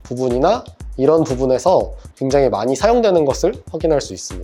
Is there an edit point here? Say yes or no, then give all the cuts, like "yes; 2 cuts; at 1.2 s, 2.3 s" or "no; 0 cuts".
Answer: no; 0 cuts